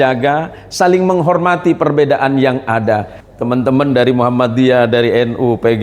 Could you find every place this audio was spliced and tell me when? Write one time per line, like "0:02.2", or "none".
0:03.2